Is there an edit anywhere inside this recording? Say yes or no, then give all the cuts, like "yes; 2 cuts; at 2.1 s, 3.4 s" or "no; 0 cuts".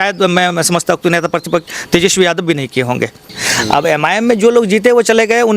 yes; 1 cut; at 3.4 s